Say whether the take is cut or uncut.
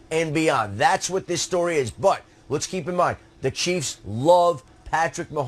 cut